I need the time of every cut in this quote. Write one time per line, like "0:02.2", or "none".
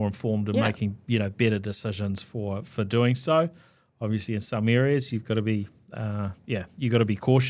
none

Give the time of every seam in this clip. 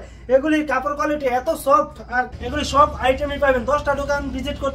0:02.4

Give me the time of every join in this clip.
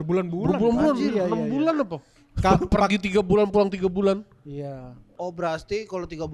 0:05.3

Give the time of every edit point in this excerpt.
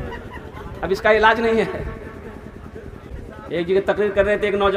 0:03.1

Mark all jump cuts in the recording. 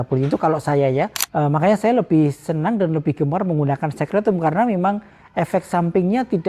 0:01.2

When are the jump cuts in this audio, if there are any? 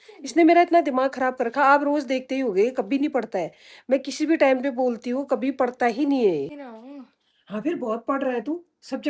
0:06.6

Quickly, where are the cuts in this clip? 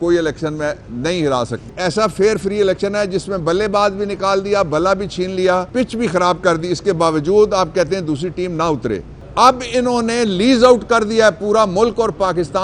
0:01.7
0:05.7
0:09.2

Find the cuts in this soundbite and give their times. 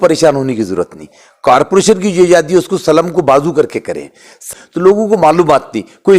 0:04.3

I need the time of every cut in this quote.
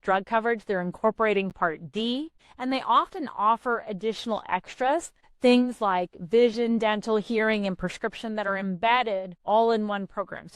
0:02.4
0:05.2
0:09.3

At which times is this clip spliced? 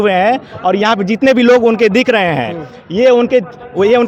none

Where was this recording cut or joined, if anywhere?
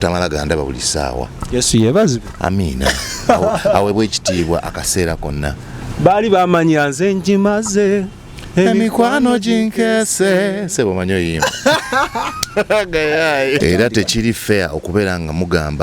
0:13.6

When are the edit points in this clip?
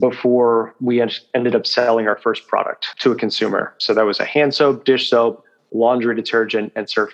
0:02.8

